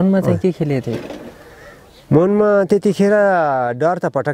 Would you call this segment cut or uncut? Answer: uncut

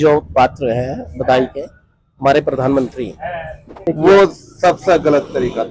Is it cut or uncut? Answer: cut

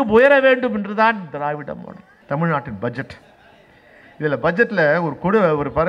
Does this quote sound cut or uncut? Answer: cut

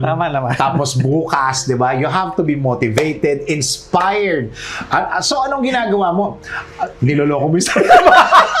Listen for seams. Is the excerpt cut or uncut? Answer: uncut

